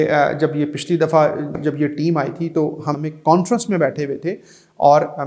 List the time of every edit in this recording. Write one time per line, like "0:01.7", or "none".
0:03.0